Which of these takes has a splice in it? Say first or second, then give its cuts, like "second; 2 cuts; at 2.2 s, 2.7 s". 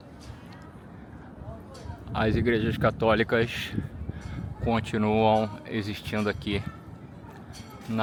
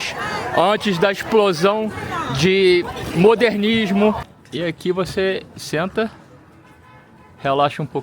second; 1 cut; at 4.3 s